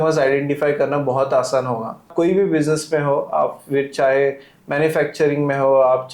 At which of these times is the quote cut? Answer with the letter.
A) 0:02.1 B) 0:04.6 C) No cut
A